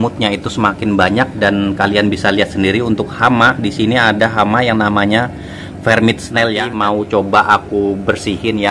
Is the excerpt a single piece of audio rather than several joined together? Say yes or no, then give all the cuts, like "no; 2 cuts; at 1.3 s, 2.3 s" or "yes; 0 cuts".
no; 1 cut; at 6.6 s